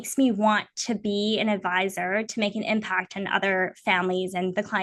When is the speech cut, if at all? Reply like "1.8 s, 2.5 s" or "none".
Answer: none